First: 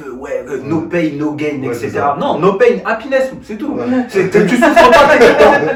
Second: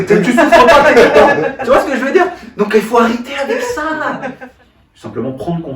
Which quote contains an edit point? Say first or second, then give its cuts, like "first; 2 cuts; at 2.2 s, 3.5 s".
second; 1 cut; at 4.3 s